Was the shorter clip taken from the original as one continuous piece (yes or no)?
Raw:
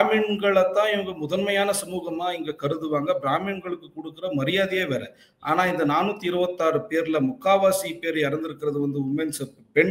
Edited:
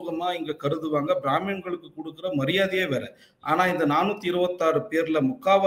yes